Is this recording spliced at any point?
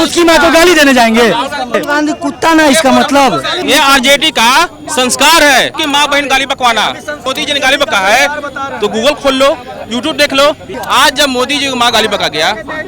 yes; 5 cuts; at 1.8 s, 3.6 s, 5.8 s, 7.2 s, 10.7 s

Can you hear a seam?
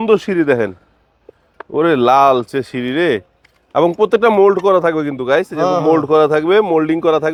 no; 0 cuts

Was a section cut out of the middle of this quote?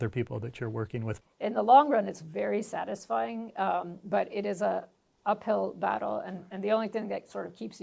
yes; 1 cut; at 1.2 s

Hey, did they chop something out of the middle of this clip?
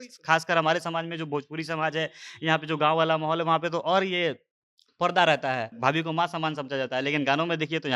yes; 1 cut; at 5.7 s

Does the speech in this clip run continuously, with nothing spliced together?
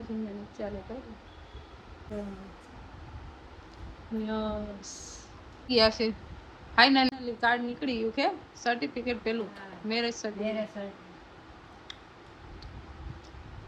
no; 2 cuts; at 2.0 s, 5.7 s

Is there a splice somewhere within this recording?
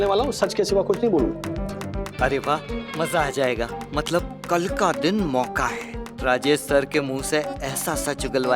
yes; 1 cut; at 1.3 s

